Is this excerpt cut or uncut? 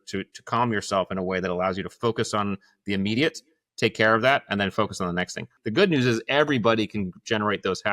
cut